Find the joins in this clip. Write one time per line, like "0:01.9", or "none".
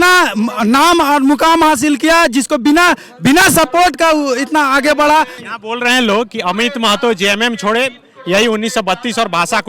0:05.4